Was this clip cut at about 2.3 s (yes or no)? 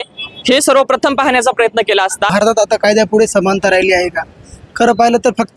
yes